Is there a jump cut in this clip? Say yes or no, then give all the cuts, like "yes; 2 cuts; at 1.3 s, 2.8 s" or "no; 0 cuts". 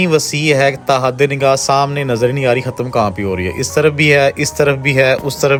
no; 0 cuts